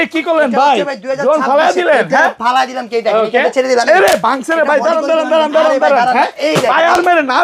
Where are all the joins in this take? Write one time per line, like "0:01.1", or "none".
none